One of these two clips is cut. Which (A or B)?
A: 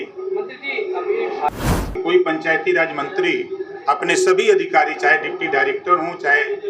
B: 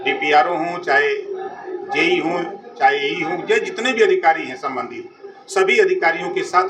A